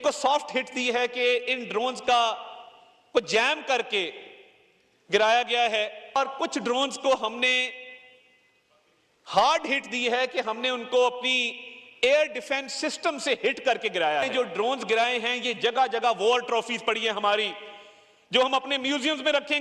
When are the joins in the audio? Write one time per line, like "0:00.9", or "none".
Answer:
0:06.2
0:14.3